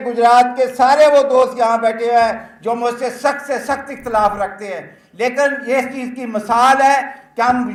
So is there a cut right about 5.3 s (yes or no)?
no